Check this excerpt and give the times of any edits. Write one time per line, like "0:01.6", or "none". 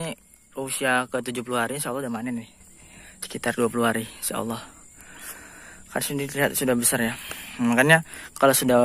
none